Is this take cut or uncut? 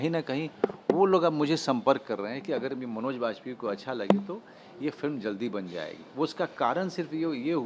uncut